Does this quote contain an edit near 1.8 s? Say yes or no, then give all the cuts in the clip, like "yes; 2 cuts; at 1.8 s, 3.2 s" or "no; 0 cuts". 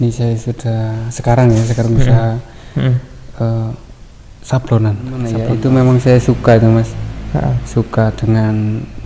no; 1 cut; at 5.4 s